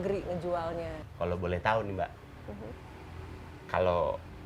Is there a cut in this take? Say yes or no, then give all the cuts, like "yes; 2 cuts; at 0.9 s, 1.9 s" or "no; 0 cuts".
no; 0 cuts